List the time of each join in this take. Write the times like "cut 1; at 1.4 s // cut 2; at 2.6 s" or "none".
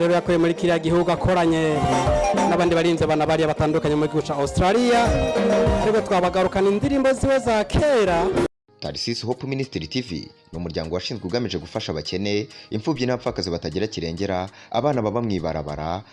cut 1; at 8.5 s